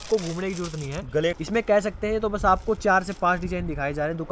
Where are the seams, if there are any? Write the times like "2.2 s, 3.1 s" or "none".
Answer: 1.3 s